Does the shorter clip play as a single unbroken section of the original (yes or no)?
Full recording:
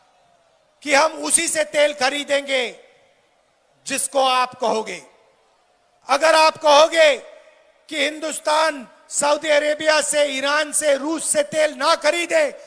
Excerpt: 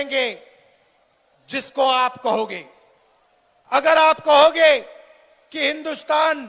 yes